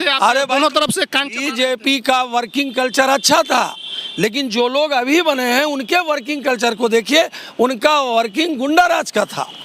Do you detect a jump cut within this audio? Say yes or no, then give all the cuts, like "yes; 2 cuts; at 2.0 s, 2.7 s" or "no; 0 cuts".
no; 0 cuts